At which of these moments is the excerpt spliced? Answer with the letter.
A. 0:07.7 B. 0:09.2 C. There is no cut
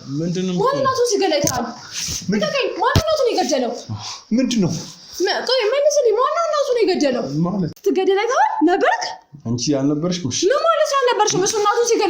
A